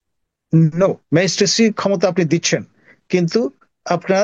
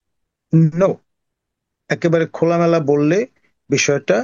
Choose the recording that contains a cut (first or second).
first